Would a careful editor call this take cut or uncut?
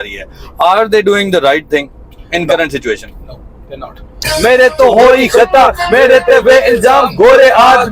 cut